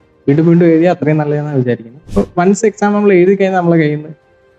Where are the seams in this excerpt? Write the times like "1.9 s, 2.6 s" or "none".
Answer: 1.9 s